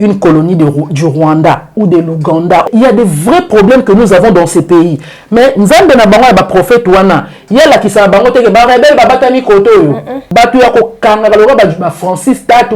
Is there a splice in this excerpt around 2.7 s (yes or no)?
yes